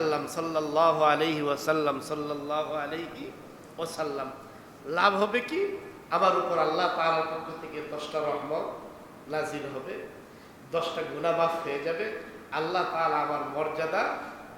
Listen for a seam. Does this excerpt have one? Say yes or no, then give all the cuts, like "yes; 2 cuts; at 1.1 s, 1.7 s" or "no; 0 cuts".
no; 0 cuts